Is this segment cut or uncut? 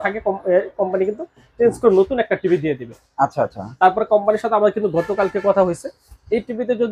uncut